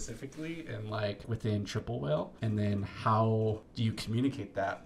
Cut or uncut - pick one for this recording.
cut